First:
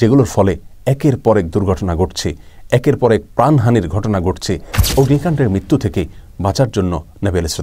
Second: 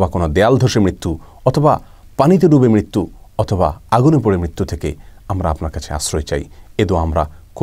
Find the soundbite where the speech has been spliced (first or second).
first